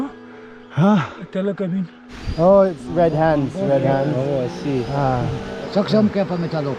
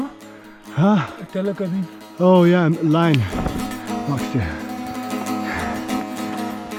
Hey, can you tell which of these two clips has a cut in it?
first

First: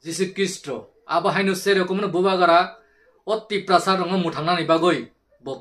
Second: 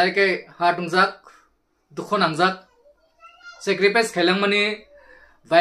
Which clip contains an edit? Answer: first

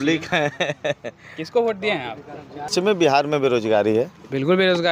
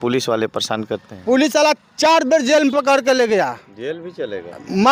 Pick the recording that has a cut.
first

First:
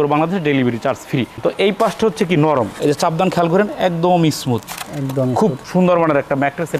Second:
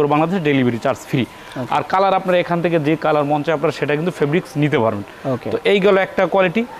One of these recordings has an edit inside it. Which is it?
first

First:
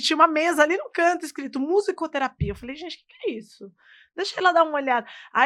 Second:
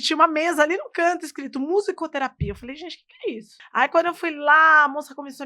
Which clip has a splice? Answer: second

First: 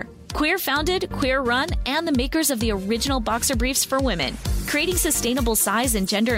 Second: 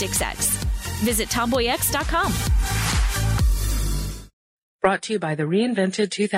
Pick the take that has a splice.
second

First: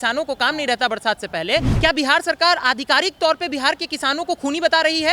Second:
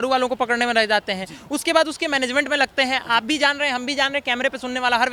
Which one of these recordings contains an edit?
first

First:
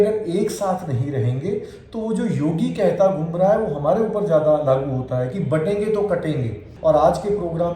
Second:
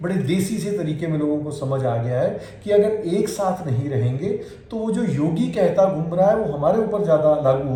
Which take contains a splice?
first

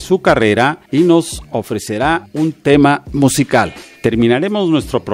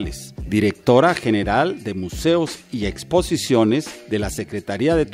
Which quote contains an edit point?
first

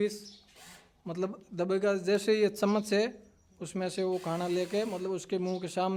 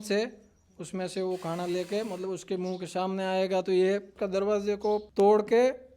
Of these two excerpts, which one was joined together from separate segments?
second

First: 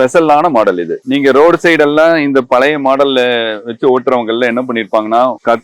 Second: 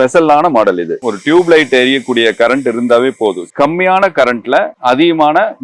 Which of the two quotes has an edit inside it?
second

